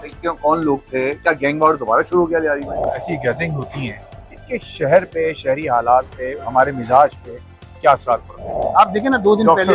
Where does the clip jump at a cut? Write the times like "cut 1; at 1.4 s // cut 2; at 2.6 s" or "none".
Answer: cut 1; at 3.0 s // cut 2; at 8.6 s